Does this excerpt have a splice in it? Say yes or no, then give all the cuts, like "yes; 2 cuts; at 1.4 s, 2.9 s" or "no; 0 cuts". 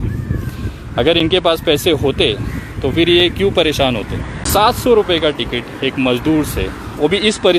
yes; 1 cut; at 4.4 s